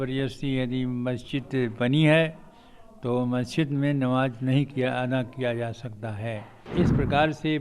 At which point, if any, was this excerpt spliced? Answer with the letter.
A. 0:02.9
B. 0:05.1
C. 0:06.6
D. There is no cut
C